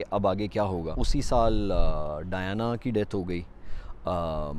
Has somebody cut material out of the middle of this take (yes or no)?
yes